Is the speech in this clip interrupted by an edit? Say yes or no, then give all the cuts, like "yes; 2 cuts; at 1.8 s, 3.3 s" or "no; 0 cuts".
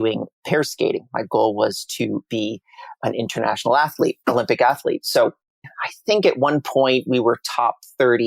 yes; 1 cut; at 5.6 s